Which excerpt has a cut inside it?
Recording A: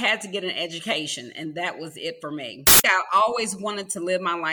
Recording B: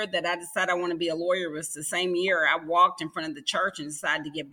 A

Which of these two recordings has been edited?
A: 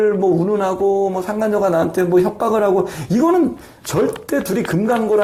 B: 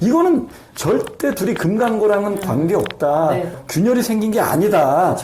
B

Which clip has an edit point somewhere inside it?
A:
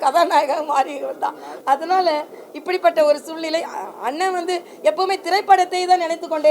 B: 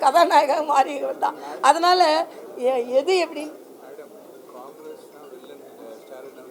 A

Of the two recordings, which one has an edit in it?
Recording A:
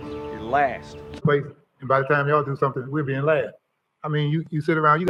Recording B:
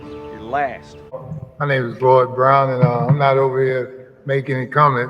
B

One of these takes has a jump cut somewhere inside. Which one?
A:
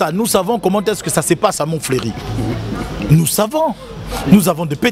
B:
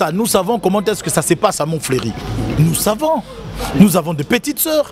B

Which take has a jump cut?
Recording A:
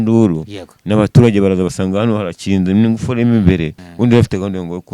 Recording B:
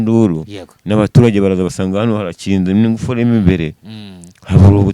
A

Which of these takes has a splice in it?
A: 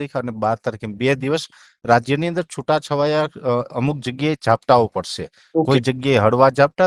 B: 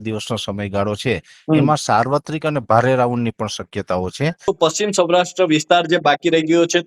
B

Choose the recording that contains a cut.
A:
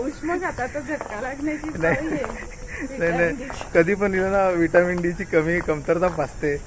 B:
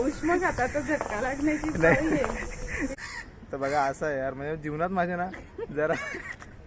B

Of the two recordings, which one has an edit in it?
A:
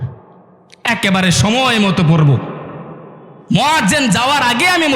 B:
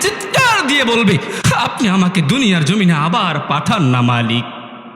B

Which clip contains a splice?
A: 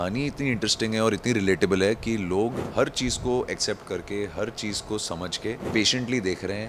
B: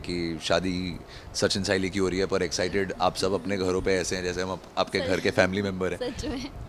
A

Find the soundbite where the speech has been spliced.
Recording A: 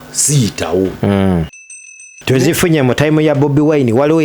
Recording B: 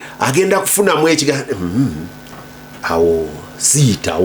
A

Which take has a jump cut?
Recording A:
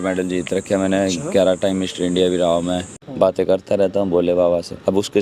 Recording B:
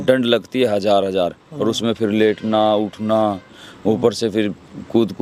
A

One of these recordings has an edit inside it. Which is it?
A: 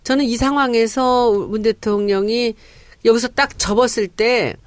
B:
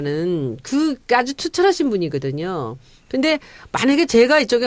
B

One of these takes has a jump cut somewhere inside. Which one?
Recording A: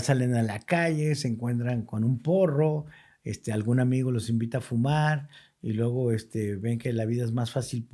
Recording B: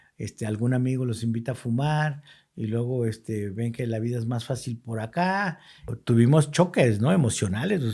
B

